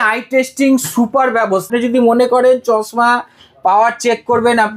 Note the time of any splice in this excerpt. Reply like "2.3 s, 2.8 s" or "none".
1.7 s